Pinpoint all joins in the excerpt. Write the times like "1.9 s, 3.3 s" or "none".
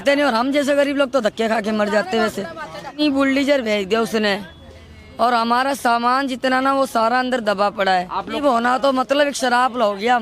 3.0 s, 8.4 s